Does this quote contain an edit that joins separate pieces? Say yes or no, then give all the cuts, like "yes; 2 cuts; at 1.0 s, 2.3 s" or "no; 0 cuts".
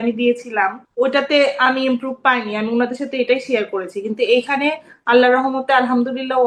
no; 0 cuts